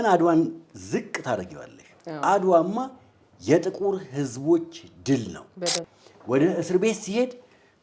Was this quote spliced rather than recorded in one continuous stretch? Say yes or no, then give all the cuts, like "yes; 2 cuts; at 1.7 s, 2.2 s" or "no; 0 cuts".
yes; 1 cut; at 5.8 s